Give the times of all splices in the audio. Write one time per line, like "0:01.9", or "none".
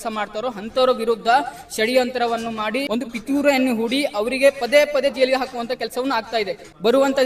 none